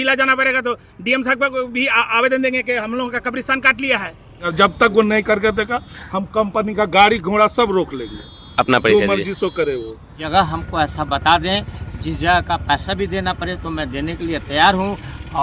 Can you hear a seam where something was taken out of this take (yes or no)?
yes